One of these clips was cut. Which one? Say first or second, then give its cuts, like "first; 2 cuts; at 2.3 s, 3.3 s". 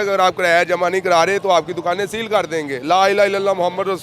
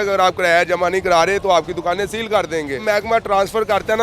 second; 1 cut; at 2.8 s